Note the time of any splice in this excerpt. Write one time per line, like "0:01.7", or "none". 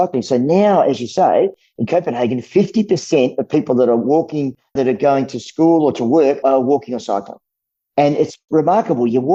none

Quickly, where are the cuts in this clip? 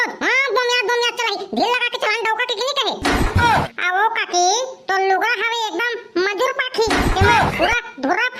0:03.7

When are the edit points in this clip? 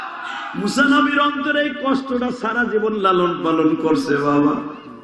none

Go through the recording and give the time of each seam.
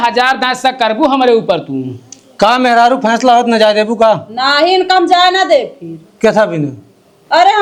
none

